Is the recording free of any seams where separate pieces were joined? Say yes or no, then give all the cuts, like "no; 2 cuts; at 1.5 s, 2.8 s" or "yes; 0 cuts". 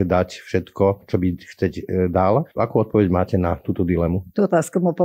no; 2 cuts; at 2.5 s, 4.2 s